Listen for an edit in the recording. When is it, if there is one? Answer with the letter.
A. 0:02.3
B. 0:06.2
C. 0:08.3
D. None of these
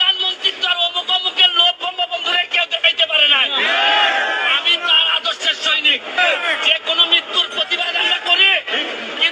B